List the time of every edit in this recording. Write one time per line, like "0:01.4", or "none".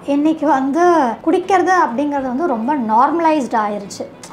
0:01.2